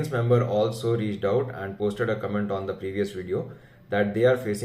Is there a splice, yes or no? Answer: no